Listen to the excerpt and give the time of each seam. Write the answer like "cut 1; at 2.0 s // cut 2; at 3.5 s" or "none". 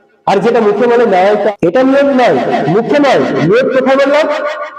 cut 1; at 1.5 s